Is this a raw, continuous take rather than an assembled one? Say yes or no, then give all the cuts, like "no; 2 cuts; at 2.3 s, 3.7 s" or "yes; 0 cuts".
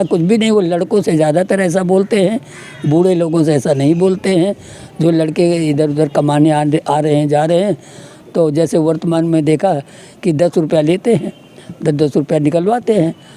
yes; 0 cuts